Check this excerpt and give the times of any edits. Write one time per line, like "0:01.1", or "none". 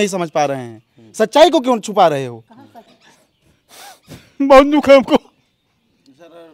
0:03.0